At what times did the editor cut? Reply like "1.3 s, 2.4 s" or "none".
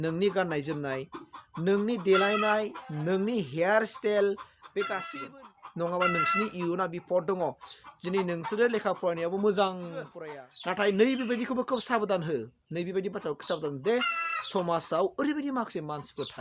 5.1 s, 10.2 s